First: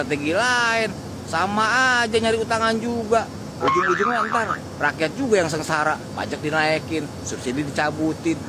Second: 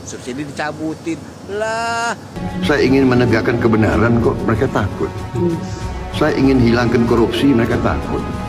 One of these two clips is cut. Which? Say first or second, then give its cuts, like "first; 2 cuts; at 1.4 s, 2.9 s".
second; 1 cut; at 2.3 s